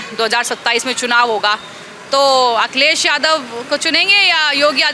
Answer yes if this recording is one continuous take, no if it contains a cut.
yes